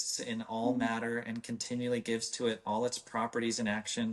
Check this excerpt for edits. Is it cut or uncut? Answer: uncut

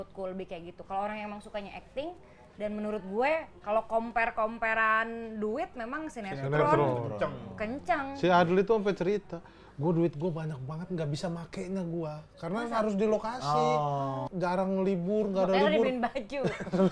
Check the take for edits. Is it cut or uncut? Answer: cut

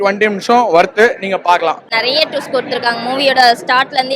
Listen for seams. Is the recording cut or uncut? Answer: cut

